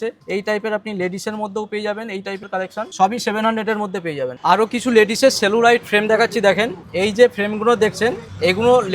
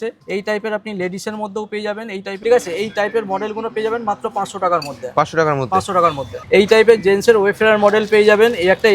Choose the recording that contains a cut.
second; 2 cuts; at 2.4 s, 6.4 s

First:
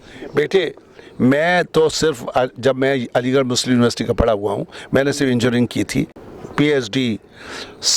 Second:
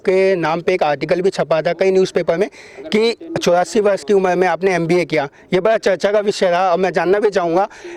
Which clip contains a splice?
first; 1 cut; at 6.2 s

